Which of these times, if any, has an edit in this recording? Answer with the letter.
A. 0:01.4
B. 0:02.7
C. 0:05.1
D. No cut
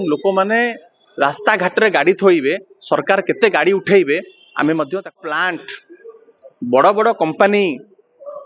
C